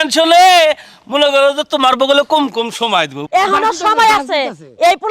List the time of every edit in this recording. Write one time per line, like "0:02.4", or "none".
0:03.2